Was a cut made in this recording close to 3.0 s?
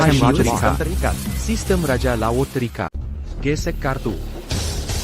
yes; 1 cut; at 3.0 s

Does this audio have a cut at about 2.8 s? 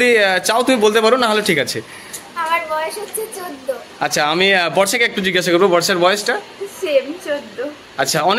no; 0 cuts

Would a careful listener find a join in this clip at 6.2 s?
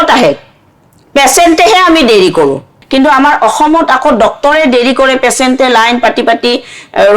no; 1 cut; at 2.8 s

